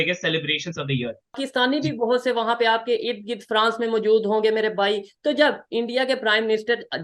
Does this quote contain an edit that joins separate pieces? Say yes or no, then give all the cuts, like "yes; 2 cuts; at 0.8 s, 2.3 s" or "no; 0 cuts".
yes; 1 cut; at 1.4 s